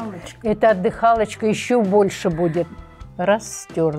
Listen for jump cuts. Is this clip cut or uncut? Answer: cut